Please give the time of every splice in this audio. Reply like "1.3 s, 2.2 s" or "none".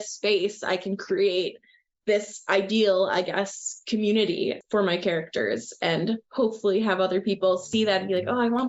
none